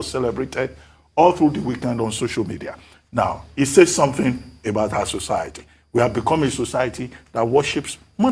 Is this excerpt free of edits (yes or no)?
yes